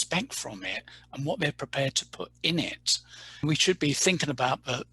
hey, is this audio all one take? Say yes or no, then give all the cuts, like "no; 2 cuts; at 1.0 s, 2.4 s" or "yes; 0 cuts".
no; 1 cut; at 3.4 s